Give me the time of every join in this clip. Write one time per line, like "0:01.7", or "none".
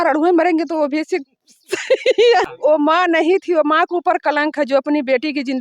0:02.4